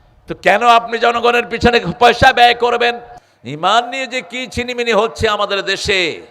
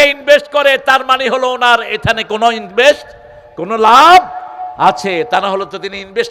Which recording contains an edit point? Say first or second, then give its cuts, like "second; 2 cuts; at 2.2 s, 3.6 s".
first; 1 cut; at 3.1 s